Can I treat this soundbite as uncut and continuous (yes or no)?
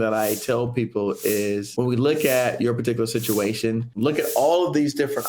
no